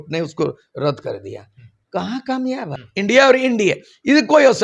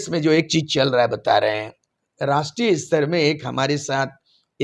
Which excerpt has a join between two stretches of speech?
first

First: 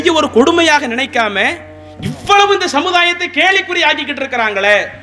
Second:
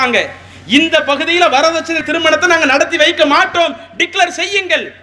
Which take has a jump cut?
second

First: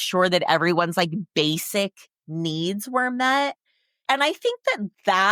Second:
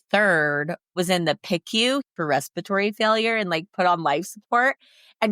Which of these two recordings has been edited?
second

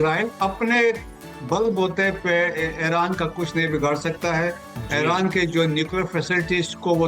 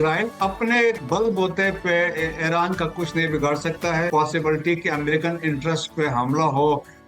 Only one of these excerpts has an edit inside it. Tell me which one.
second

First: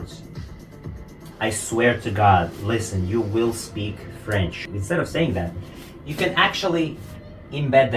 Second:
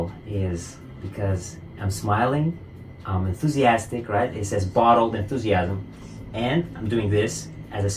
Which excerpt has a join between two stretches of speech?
first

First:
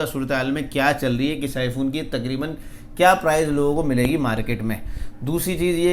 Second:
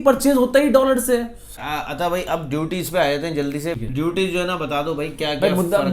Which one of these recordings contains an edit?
second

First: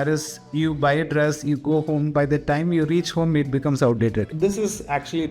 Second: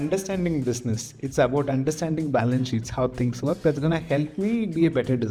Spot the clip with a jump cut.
first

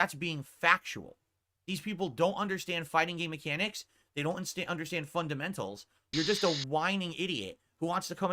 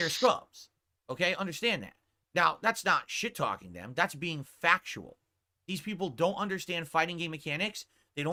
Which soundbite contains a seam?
first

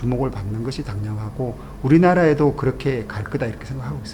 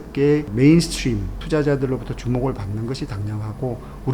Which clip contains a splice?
second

